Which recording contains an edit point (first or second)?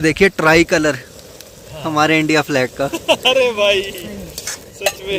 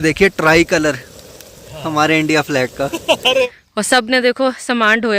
second